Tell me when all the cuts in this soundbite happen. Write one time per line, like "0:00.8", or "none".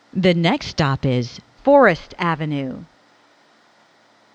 0:02.9